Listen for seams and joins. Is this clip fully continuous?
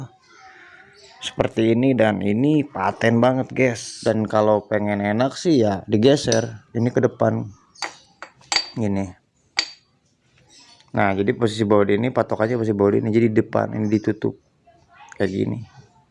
no; 1 cut; at 3.9 s

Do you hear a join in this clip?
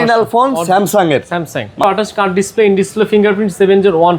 yes; 1 cut; at 1.8 s

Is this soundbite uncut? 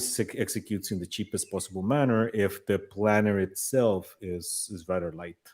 yes; 0 cuts

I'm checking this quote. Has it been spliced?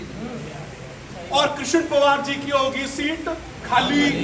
no; 0 cuts

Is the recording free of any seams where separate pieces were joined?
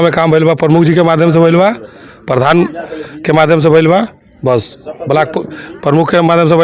yes; 0 cuts

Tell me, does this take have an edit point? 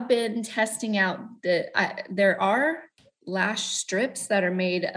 no; 0 cuts

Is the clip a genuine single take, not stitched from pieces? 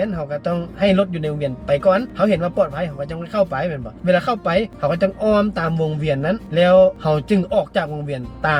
yes; 0 cuts

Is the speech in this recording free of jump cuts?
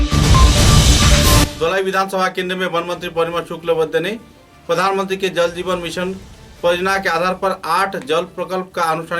yes; 0 cuts

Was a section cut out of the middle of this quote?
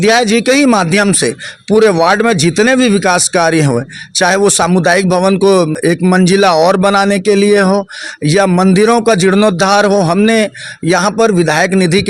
yes; 1 cut; at 5.7 s

